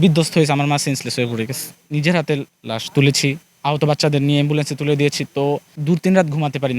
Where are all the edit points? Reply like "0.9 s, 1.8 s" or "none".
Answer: 1.8 s, 5.7 s